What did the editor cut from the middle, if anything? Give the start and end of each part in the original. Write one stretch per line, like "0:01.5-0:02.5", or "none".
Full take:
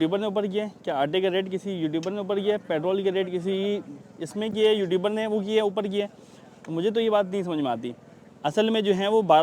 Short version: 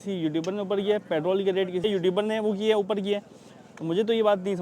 0:03.4-0:04.7